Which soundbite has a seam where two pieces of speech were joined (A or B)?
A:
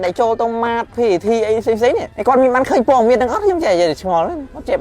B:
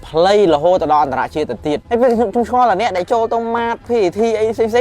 B